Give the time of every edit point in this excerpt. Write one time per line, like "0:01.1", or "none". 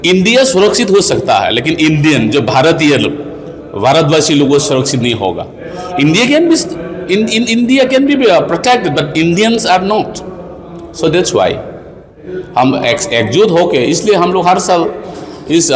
none